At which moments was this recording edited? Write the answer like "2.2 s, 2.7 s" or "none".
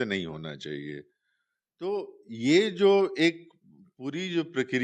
none